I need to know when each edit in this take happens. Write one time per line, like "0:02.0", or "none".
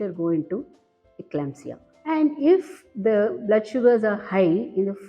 0:01.9